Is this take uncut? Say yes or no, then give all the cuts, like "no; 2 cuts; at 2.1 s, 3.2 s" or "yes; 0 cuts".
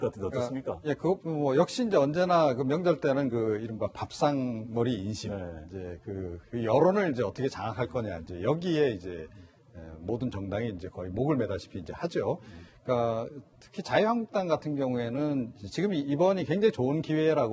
no; 1 cut; at 16.4 s